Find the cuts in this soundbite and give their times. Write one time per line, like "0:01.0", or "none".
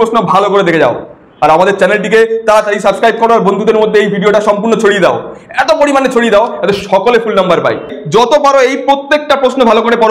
0:08.0